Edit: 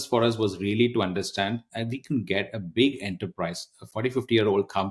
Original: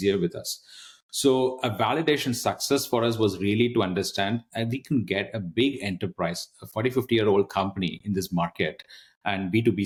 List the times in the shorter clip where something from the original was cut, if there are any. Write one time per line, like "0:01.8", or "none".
none